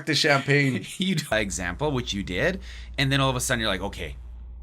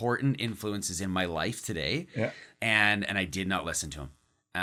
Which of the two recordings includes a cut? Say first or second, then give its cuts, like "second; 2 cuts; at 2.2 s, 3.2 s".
first; 1 cut; at 1.3 s